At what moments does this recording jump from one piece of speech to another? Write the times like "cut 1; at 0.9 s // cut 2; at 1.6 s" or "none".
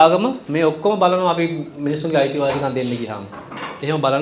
none